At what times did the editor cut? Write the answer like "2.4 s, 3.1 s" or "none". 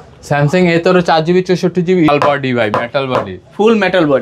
2.1 s